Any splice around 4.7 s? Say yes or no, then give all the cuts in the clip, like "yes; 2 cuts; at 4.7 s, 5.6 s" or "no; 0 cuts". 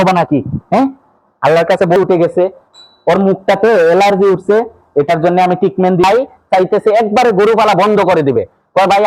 no; 2 cuts; at 2.0 s, 6.0 s